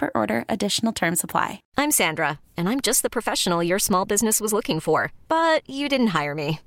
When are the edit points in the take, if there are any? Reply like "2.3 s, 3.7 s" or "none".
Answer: 1.6 s